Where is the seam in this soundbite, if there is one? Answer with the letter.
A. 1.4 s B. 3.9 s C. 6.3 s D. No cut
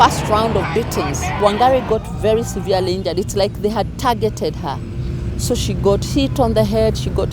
A